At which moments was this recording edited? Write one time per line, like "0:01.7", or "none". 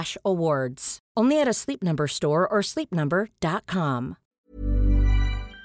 0:04.2